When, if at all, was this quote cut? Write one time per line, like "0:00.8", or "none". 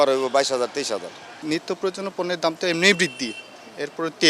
0:01.4